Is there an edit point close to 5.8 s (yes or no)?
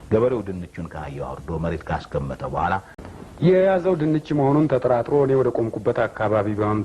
no